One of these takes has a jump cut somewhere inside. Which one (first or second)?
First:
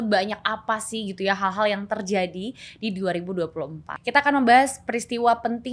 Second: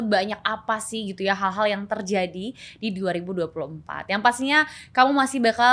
first